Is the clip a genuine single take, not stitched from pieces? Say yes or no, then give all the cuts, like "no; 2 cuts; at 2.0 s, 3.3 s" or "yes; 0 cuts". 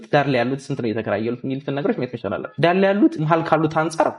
no; 2 cuts; at 2.5 s, 3.2 s